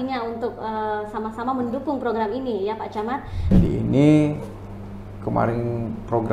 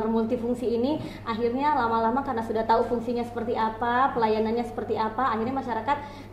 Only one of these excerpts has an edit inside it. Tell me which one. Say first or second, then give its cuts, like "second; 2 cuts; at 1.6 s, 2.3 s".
first; 1 cut; at 3.4 s